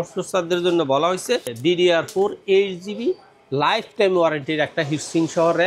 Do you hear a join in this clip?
yes; 1 cut; at 1.5 s

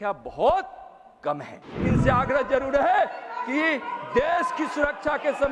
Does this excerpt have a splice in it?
yes; 1 cut; at 1.9 s

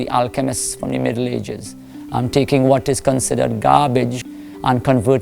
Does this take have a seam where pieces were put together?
yes; 1 cut; at 4.2 s

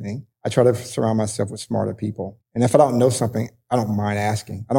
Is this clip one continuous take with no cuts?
no; 1 cut; at 2.4 s

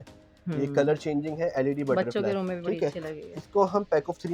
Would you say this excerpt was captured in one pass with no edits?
yes; 0 cuts

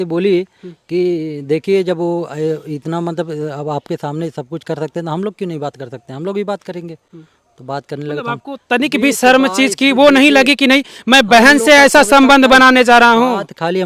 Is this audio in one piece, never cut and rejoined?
yes; 0 cuts

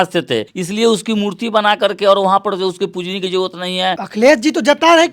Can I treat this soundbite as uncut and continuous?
no; 1 cut; at 4.0 s

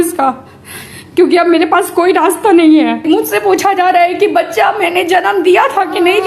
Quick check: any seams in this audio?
yes; 1 cut; at 3.0 s

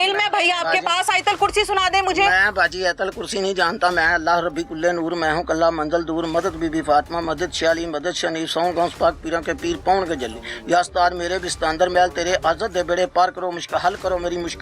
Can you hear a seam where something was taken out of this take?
no; 0 cuts

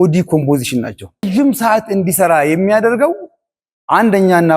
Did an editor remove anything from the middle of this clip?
yes; 1 cut; at 1.3 s

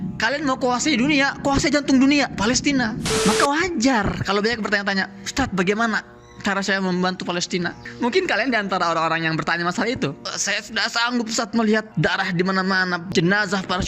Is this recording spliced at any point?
yes; 2 cuts; at 3.1 s, 7.8 s

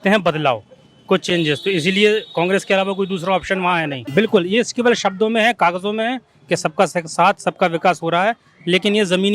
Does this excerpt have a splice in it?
yes; 1 cut; at 4.0 s

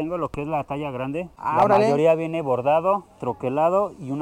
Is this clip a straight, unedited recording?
no; 1 cut; at 1.3 s

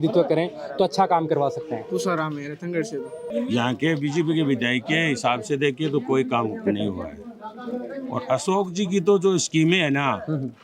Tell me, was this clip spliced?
yes; 1 cut; at 3.2 s

